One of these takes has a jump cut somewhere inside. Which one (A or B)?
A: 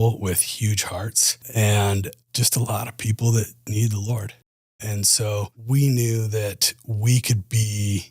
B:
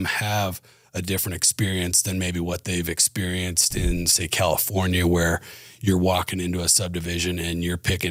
A